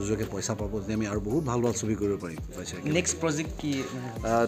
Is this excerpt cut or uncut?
cut